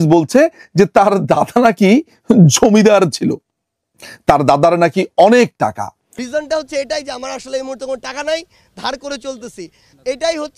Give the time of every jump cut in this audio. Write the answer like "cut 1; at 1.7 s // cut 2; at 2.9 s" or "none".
cut 1; at 6.2 s